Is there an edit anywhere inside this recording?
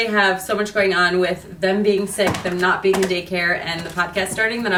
no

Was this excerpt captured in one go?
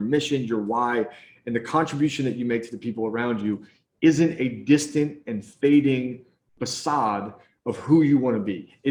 yes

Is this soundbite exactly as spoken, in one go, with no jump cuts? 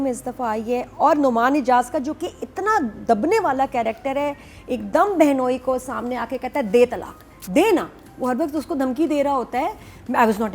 yes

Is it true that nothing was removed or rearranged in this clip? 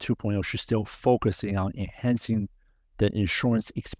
yes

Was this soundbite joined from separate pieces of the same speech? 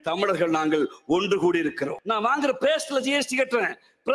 yes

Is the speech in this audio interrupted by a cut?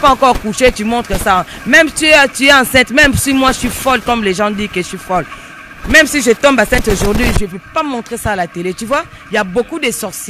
no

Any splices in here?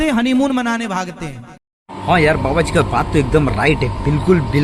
no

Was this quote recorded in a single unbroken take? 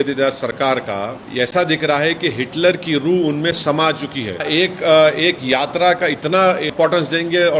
no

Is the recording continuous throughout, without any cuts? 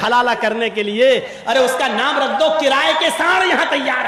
yes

